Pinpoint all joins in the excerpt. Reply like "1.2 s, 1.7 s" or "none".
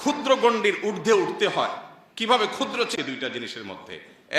3.0 s